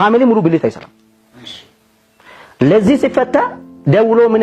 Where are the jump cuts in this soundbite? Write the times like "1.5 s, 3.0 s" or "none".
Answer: none